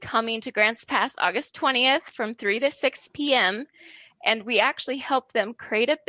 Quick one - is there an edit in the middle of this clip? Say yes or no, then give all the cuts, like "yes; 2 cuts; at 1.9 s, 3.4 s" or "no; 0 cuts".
no; 0 cuts